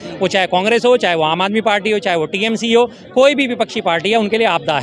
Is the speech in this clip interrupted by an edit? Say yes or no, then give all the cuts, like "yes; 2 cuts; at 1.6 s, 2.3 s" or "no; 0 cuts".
no; 0 cuts